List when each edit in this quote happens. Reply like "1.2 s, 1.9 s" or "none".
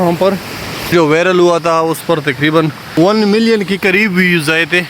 0.9 s, 2.8 s